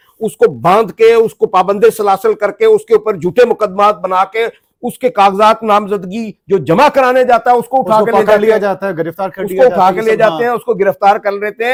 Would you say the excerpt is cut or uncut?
uncut